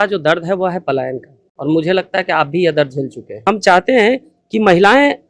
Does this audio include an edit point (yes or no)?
yes